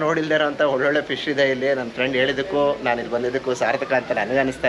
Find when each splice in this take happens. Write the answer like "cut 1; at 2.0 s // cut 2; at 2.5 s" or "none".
none